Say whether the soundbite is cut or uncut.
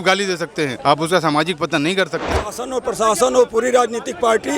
cut